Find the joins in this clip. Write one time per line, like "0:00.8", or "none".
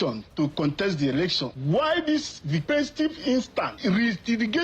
0:01.5
0:02.6
0:03.7

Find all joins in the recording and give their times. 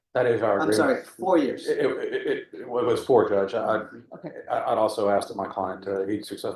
none

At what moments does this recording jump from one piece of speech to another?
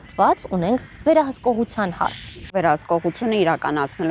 0:02.5

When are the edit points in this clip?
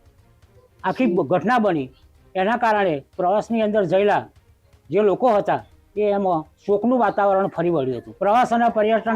0:08.0

